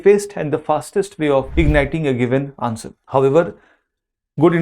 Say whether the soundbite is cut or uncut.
cut